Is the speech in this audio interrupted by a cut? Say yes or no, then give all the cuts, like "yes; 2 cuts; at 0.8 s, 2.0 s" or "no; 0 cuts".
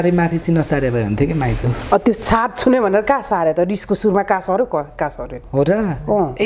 no; 0 cuts